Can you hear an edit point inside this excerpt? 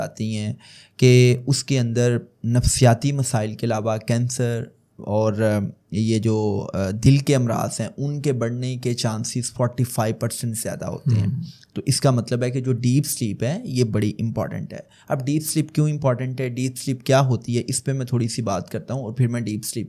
no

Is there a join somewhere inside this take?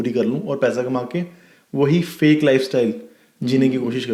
no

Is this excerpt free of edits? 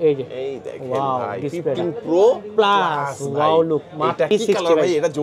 no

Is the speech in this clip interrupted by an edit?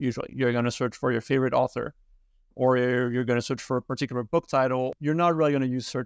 yes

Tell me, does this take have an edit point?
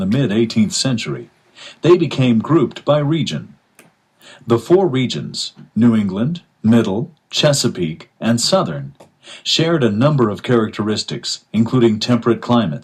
no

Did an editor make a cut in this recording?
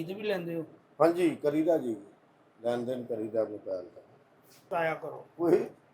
yes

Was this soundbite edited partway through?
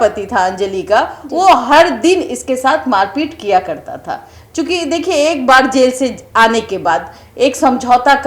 no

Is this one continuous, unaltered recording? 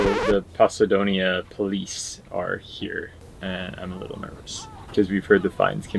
no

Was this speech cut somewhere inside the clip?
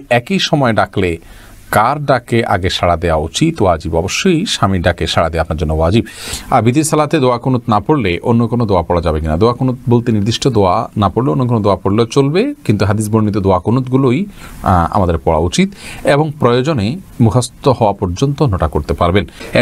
no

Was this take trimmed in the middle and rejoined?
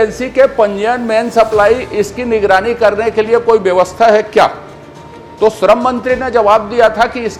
no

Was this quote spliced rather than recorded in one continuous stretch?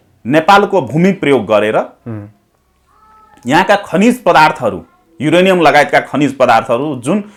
no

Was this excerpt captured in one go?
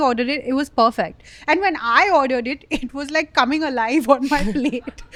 yes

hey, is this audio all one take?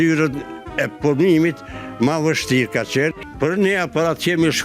no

